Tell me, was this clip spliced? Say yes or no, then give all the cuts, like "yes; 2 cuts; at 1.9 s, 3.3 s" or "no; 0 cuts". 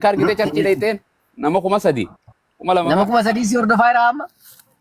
no; 0 cuts